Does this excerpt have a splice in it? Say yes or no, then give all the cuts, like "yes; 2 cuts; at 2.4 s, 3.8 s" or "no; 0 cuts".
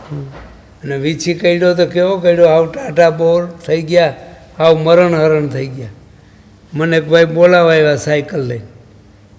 no; 0 cuts